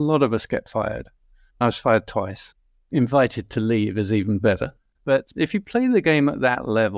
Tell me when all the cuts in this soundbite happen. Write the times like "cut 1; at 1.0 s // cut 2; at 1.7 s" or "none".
cut 1; at 1.6 s // cut 2; at 5.2 s